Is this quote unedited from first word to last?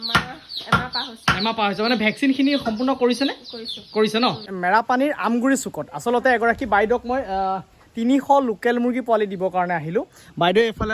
no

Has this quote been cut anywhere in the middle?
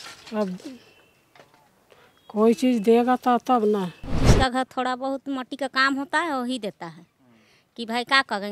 yes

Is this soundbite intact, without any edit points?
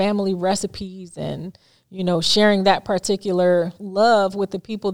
yes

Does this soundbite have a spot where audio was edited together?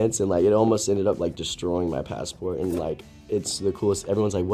no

